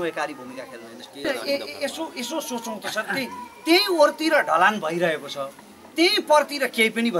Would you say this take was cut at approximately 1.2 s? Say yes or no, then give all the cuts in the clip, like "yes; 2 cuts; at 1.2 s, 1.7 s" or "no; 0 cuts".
yes; 1 cut; at 1.2 s